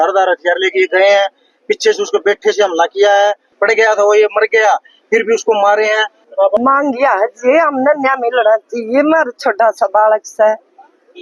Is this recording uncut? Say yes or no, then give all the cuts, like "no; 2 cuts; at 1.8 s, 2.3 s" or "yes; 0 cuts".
no; 2 cuts; at 3.5 s, 6.2 s